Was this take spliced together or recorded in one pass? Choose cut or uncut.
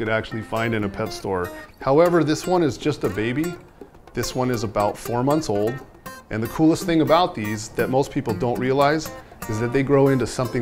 uncut